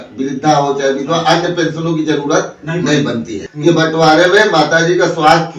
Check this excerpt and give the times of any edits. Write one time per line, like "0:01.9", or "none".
0:03.4